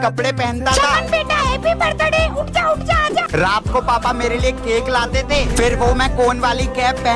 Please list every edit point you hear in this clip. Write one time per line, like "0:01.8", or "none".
none